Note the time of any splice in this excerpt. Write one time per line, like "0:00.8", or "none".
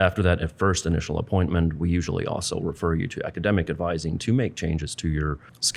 none